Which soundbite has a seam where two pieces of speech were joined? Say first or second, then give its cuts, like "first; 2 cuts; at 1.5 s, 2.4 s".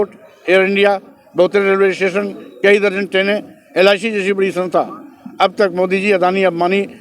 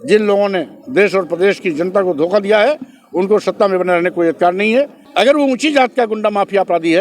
second; 1 cut; at 5.0 s